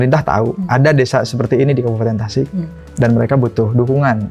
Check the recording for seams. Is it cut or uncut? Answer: uncut